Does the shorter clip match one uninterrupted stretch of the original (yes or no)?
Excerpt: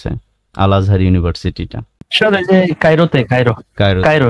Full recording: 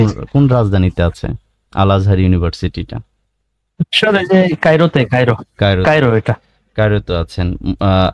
no